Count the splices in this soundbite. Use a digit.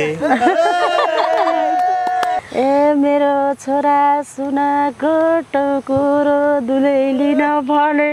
1